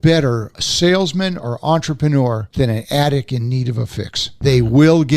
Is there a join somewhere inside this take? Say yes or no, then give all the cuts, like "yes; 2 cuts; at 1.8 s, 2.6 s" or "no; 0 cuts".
yes; 2 cuts; at 2.5 s, 4.2 s